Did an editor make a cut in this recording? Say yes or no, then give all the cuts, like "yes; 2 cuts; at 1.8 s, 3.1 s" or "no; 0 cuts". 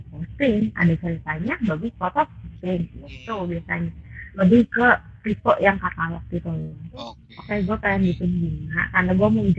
yes; 1 cut; at 7.3 s